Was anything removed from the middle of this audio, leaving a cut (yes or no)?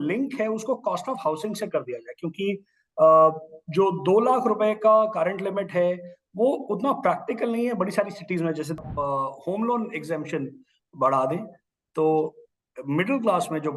yes